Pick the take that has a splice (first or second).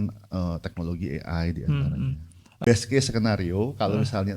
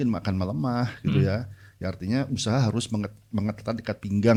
first